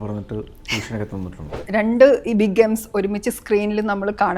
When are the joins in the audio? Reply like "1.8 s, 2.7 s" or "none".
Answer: 1.5 s